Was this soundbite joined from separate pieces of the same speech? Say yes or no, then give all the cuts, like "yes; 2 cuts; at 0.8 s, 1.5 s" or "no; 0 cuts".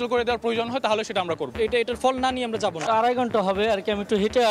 yes; 2 cuts; at 1.5 s, 2.8 s